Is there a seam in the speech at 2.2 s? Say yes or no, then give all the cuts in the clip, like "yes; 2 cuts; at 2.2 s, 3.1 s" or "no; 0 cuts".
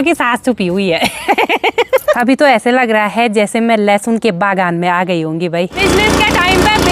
yes; 2 cuts; at 2.2 s, 5.8 s